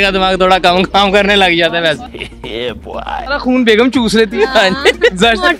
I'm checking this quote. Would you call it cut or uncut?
uncut